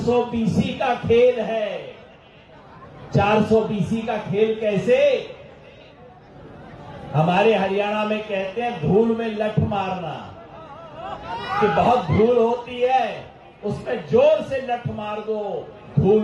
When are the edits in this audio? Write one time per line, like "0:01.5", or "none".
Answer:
none